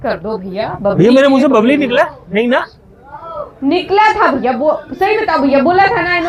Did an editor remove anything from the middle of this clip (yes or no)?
no